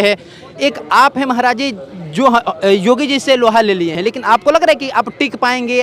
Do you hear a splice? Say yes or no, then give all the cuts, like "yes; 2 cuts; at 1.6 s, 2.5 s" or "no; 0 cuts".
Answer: no; 0 cuts